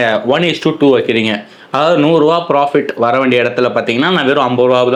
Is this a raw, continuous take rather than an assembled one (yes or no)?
yes